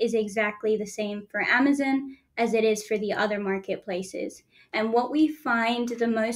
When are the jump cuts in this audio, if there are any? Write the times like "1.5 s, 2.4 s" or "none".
4.6 s

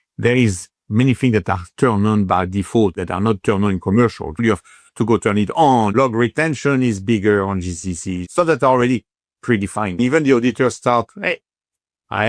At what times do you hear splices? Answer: 3.0 s, 4.4 s, 5.9 s, 8.1 s, 10.0 s

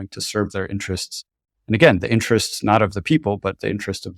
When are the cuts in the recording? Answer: none

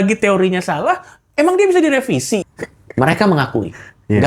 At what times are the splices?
2.5 s

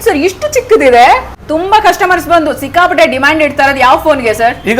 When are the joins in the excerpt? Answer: 1.3 s

